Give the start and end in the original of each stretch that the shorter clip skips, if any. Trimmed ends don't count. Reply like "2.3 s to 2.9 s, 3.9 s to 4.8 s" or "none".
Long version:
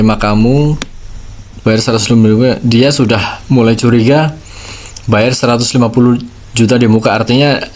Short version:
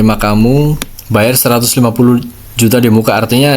0.9 s to 4.9 s